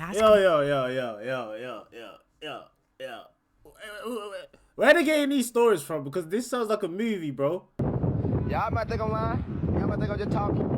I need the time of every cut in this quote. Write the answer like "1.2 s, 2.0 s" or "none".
7.8 s